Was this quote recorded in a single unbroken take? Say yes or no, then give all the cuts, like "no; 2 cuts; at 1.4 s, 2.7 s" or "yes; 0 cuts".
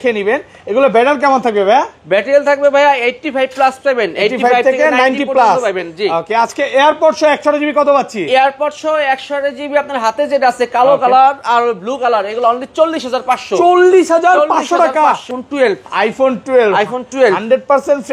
no; 1 cut; at 15.4 s